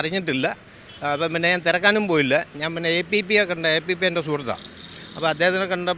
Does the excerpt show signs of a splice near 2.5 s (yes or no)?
no